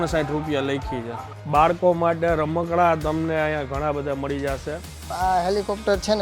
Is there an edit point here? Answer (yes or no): yes